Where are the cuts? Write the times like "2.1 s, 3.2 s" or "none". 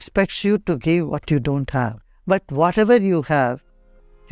2.1 s